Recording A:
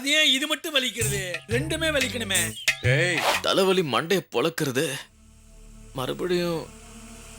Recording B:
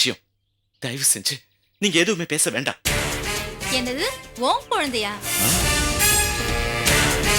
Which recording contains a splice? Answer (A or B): A